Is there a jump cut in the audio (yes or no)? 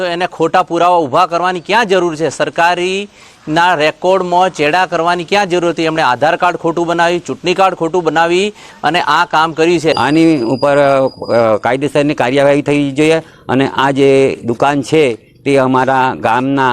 yes